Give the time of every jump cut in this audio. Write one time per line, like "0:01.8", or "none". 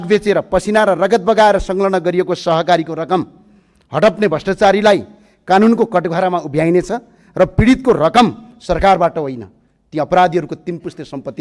none